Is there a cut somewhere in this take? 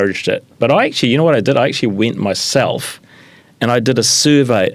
no; 0 cuts

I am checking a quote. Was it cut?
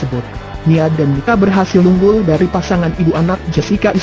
yes; 1 cut; at 1.1 s

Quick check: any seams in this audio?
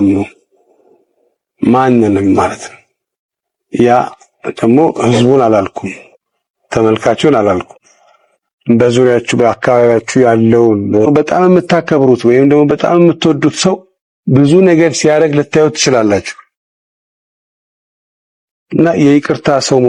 no; 0 cuts

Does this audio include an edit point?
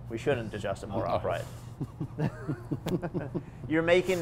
yes; 1 cut; at 1.5 s

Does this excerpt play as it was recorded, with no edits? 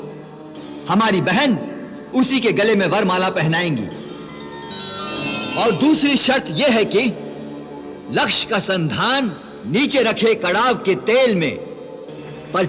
no; 2 cuts; at 5.4 s, 9.5 s

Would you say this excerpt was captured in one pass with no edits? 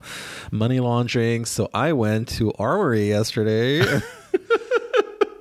yes; 0 cuts

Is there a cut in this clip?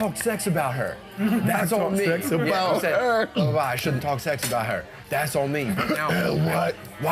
yes; 1 cut; at 3.3 s

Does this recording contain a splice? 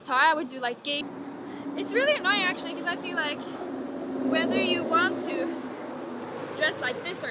yes; 1 cut; at 1.1 s

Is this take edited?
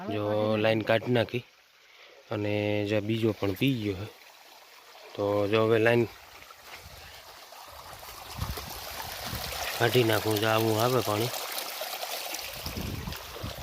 no; 0 cuts

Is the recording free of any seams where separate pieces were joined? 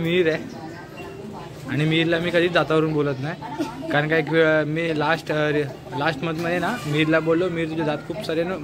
yes; 0 cuts

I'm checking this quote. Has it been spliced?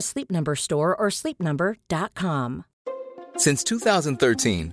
yes; 1 cut; at 2.7 s

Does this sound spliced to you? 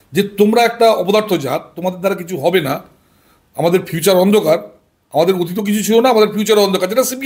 no; 0 cuts

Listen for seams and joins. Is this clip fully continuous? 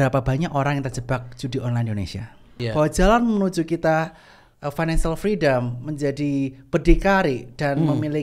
no; 1 cut; at 2.5 s

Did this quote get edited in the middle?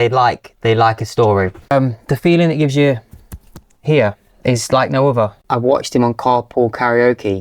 yes; 2 cuts; at 1.6 s, 5.4 s

